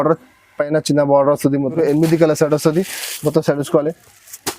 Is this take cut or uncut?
cut